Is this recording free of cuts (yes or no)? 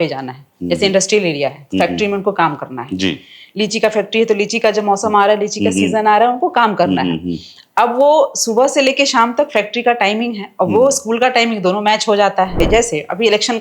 no